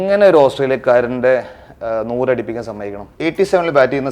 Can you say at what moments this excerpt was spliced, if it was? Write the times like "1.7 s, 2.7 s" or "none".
3.0 s